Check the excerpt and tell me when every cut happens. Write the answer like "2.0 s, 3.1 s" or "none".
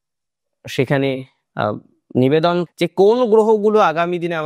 2.7 s